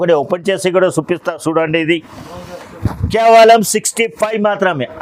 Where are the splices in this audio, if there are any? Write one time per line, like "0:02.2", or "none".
none